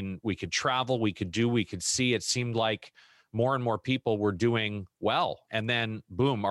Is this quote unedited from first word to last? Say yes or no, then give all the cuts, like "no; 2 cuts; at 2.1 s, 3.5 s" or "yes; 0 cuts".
no; 1 cut; at 5.5 s